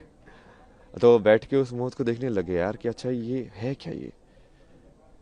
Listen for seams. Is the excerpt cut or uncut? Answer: uncut